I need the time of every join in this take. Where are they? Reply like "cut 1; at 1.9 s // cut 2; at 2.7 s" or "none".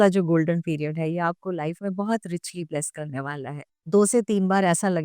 cut 1; at 3.6 s